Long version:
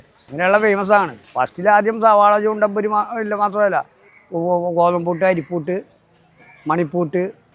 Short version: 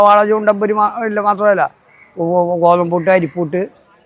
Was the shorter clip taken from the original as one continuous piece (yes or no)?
yes